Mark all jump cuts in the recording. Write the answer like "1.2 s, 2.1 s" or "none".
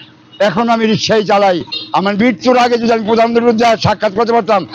1.8 s